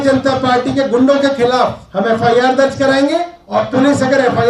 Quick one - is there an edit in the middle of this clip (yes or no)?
yes